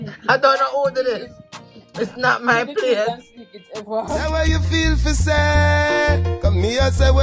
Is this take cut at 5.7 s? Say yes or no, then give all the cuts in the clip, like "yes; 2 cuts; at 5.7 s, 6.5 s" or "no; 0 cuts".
no; 1 cut; at 4.2 s